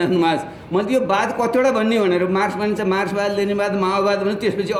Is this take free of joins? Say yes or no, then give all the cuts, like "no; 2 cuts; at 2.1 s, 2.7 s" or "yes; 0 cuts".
yes; 0 cuts